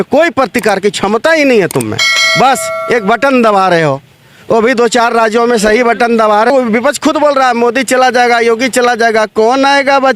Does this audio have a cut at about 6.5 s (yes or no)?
yes